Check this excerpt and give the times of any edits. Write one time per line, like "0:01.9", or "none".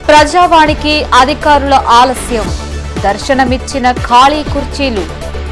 none